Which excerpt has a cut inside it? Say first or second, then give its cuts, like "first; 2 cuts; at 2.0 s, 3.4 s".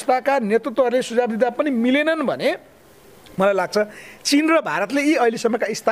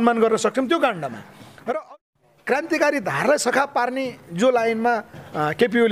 second; 1 cut; at 1.9 s